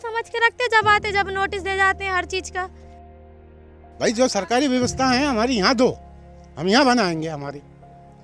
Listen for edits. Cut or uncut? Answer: cut